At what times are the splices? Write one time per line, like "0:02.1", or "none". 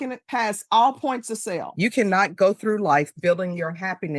0:01.7

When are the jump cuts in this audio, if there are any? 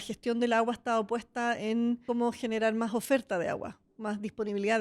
0:02.0

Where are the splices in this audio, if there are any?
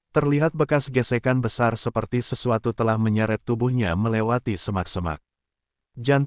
none

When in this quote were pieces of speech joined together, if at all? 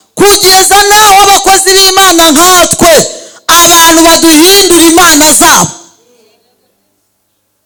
none

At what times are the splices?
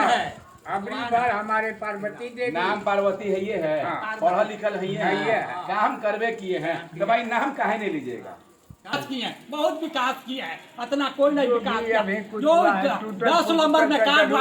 0:08.9

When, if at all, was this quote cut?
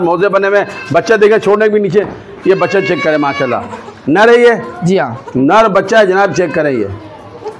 none

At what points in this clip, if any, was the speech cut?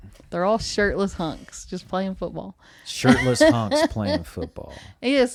none

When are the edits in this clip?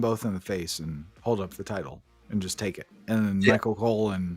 none

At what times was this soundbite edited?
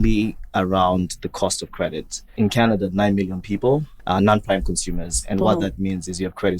0:02.3
0:03.9

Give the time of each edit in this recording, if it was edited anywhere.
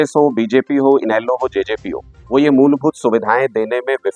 none

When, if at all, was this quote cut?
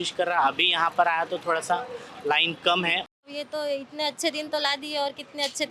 0:03.1

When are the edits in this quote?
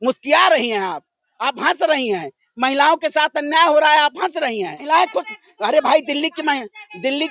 0:04.8

